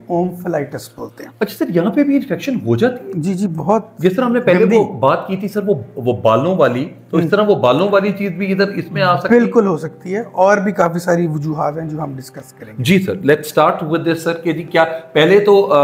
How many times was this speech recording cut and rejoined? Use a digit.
0